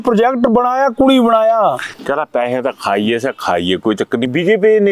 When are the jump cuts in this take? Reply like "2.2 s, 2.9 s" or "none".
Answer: none